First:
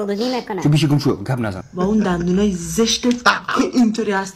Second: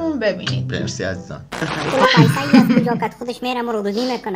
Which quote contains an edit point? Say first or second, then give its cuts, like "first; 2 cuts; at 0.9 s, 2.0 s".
second; 1 cut; at 1.7 s